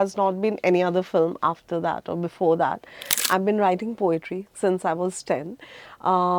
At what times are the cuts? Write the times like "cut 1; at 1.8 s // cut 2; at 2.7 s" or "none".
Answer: cut 1; at 3.2 s

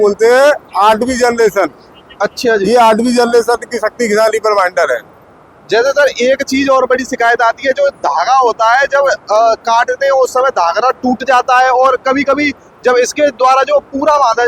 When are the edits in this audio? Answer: none

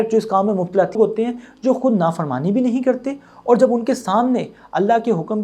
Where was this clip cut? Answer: cut 1; at 1.0 s

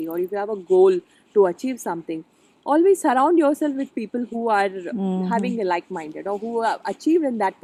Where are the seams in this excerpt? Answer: none

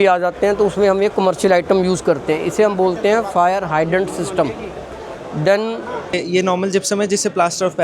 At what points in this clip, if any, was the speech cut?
cut 1; at 6.1 s

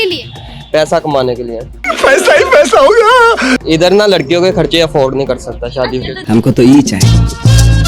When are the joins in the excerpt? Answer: cut 1; at 3.6 s

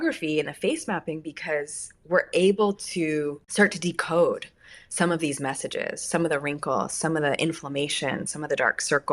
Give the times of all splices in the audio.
cut 1; at 3.4 s

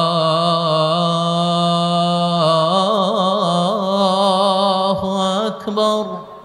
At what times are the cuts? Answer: none

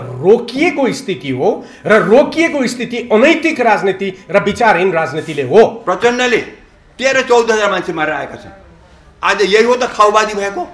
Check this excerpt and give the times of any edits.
cut 1; at 5.8 s

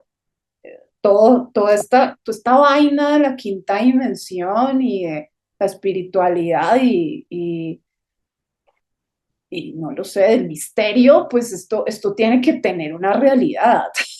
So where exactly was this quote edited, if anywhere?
none

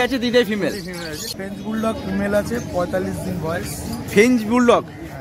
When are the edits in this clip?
cut 1; at 1.3 s

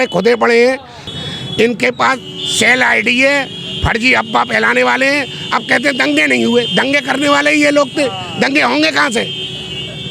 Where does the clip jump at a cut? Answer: cut 1; at 1.1 s

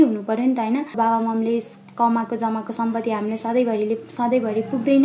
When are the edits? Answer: cut 1; at 0.9 s

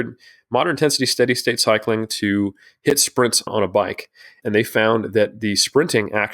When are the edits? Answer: cut 1; at 3.4 s

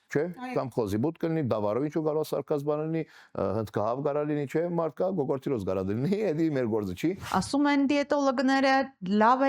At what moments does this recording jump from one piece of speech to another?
cut 1; at 7.2 s

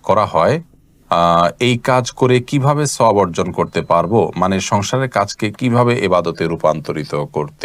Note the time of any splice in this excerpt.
none

